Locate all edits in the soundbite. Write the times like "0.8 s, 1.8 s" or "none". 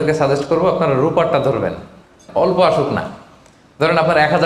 2.2 s